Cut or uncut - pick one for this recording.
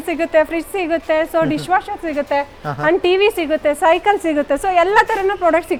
uncut